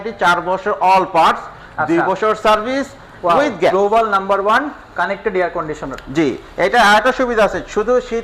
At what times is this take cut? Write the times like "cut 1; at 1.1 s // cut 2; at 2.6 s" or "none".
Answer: cut 1; at 3.7 s